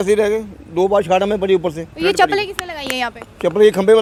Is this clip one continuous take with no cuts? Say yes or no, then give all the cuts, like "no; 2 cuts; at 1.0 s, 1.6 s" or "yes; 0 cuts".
yes; 0 cuts